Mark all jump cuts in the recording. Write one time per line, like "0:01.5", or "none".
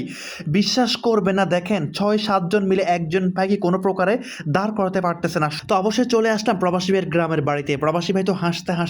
0:05.5